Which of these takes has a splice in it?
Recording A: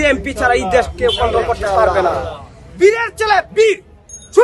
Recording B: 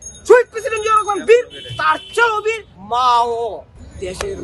B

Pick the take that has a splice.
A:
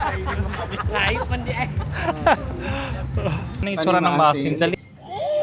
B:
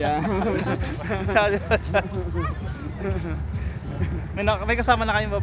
A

